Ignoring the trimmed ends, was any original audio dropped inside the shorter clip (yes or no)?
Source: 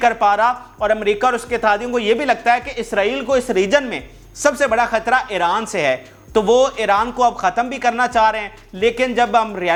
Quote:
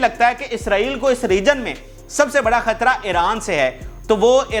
no